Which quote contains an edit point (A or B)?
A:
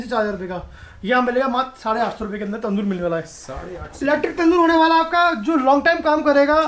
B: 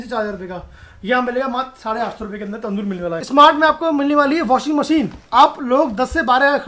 B